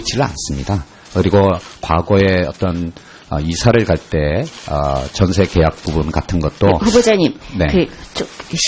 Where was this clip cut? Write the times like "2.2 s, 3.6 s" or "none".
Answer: none